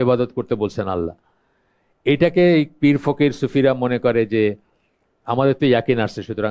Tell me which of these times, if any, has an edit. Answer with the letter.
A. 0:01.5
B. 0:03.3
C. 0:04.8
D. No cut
D